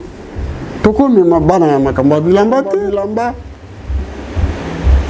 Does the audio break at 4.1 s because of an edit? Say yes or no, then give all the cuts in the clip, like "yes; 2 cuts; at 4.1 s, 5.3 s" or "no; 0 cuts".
no; 1 cut; at 2.9 s